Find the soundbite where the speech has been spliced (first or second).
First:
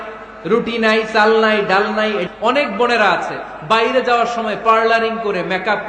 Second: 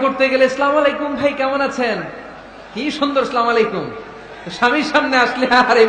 first